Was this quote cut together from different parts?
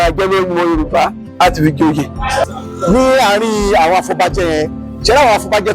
yes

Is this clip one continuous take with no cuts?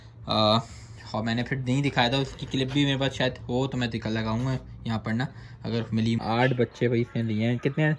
no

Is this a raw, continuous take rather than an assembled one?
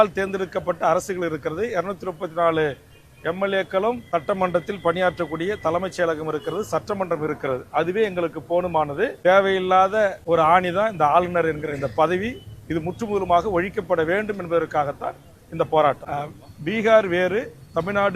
no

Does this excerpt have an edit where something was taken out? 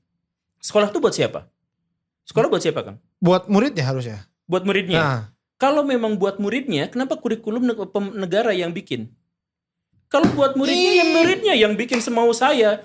no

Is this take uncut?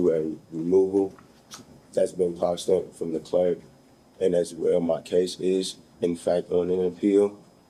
yes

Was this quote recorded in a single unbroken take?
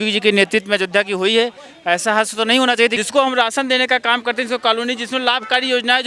no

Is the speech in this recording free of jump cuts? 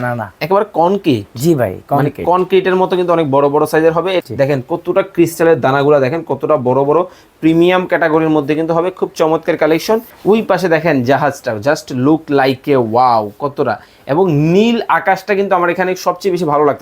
no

